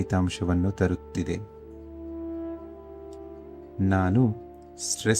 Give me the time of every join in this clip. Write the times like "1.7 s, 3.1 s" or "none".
1.5 s, 3.2 s